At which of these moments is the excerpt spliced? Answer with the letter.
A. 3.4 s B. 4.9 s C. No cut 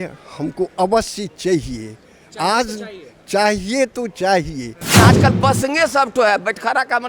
B